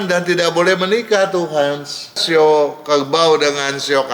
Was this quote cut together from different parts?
yes; 1 cut; at 2.2 s

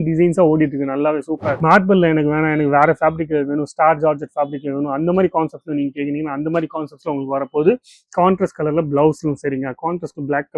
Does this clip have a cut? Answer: yes; 1 cut; at 1.5 s

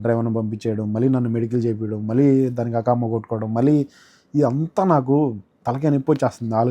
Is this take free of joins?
yes; 0 cuts

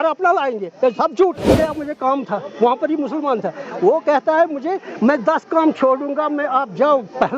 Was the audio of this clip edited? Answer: yes; 1 cut; at 1.6 s

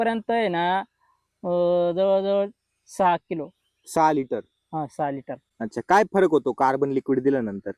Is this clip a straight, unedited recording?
yes; 0 cuts

